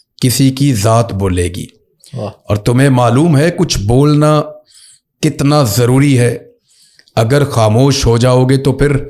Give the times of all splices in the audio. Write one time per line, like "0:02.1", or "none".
none